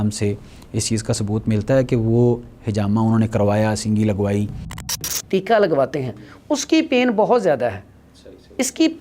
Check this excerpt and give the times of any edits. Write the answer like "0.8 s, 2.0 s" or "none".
5.1 s

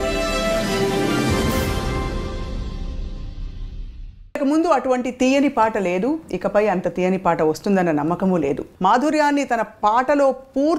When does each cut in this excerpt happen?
4.4 s, 8.7 s

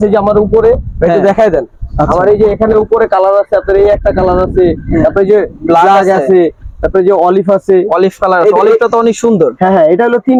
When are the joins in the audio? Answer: none

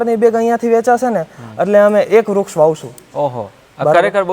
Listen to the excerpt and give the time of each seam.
none

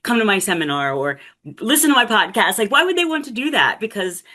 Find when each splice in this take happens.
none

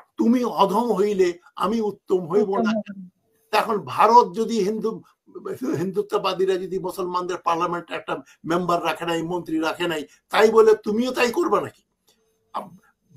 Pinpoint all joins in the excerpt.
none

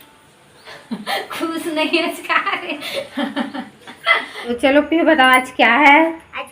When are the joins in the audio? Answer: 4.6 s

